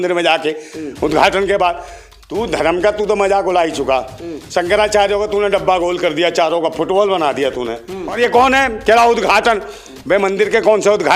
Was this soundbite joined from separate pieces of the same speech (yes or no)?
yes